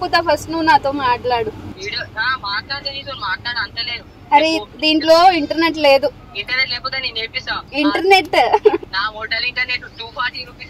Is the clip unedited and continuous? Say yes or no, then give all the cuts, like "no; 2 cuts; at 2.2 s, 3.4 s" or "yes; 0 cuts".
no; 4 cuts; at 1.7 s, 6.2 s, 7.7 s, 8.9 s